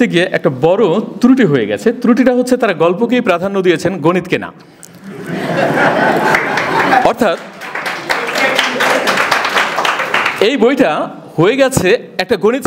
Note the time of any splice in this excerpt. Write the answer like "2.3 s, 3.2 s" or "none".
none